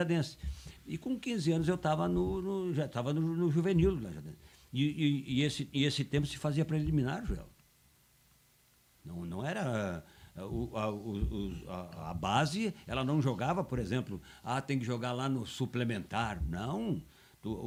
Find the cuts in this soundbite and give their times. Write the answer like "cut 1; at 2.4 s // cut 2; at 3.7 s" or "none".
none